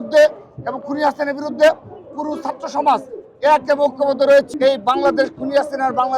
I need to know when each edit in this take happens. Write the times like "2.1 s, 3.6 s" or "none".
4.5 s